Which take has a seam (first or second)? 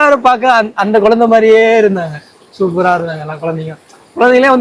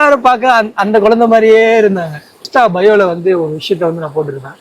second